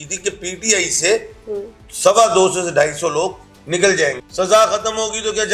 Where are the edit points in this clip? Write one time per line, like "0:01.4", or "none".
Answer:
0:04.2

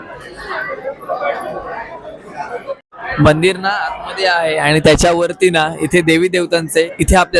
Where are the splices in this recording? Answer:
none

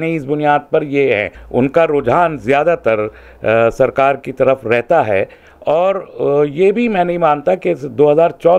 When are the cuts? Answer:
0:01.3

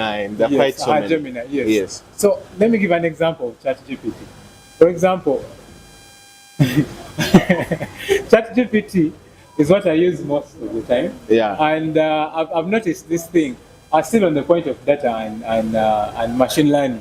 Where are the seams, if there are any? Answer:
none

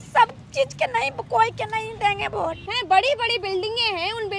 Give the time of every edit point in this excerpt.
0:02.7

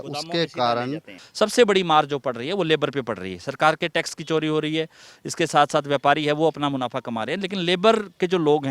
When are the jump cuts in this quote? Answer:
0:01.2

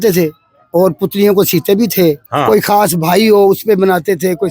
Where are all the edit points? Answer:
0:02.3

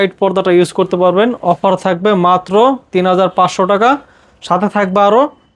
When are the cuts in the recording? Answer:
none

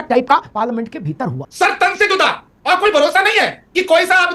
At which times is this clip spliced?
0:01.4

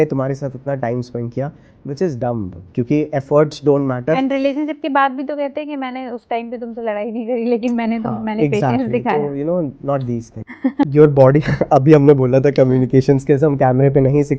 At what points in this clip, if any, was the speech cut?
0:10.8

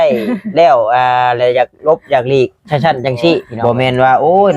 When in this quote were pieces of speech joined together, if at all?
0:03.5

